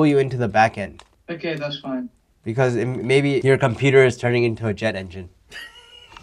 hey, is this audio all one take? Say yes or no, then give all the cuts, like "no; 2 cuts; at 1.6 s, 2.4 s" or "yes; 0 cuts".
no; 2 cuts; at 1.1 s, 3.4 s